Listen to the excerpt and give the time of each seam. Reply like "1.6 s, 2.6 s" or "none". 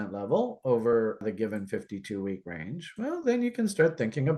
1.2 s